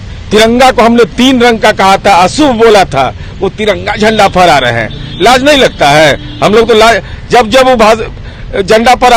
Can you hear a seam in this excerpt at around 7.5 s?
no; 0 cuts

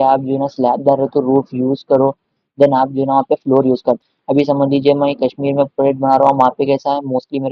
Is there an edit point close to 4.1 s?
yes; 1 cut; at 4.1 s

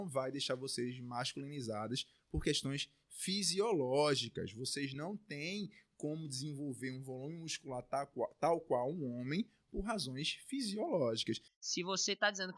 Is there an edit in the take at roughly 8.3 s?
no; 1 cut; at 11.5 s

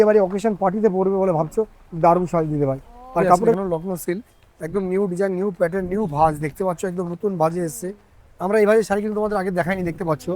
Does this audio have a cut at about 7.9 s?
no; 1 cut; at 3.5 s

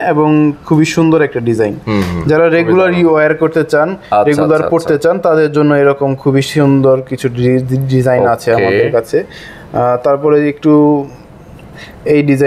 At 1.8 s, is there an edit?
no; 0 cuts

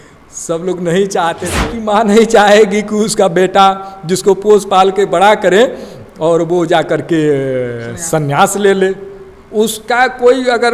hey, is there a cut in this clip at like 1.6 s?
yes; 1 cut; at 1.6 s

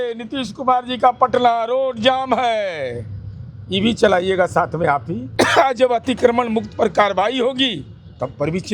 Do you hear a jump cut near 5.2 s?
yes; 1 cut; at 5.2 s

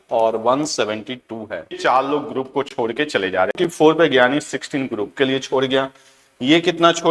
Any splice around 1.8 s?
yes; 2 cuts; at 1.8 s, 3.5 s

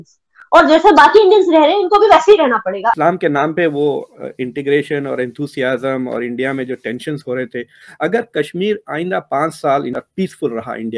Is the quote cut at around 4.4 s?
no; 1 cut; at 2.9 s

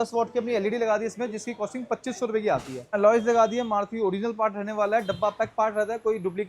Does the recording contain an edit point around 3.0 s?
yes; 1 cut; at 3.0 s

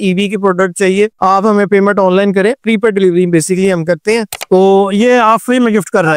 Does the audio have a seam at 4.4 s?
yes; 1 cut; at 4.4 s

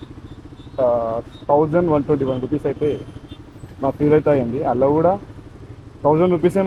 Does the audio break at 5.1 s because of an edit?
no; 0 cuts

